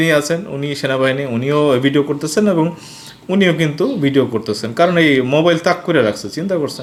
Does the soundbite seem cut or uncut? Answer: uncut